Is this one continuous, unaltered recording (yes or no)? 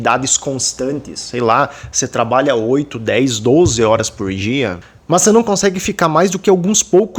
no